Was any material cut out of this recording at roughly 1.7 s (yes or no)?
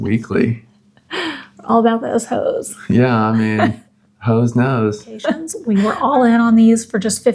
no